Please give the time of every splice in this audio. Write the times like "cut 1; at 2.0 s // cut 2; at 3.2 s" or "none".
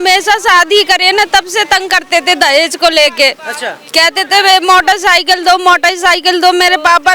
none